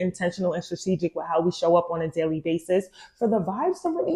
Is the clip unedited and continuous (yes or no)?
yes